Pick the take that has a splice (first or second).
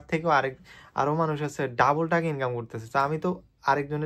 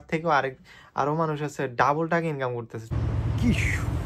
second